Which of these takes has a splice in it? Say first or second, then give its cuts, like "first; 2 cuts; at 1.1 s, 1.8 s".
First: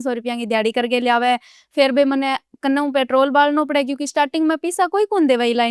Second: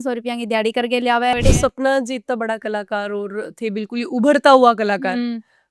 second; 1 cut; at 1.3 s